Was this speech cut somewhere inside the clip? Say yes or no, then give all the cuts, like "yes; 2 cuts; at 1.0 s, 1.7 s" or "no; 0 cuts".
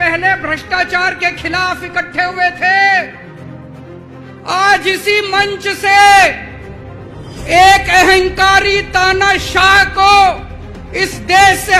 no; 0 cuts